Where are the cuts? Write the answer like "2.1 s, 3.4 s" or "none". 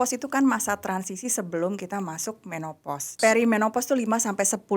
3.2 s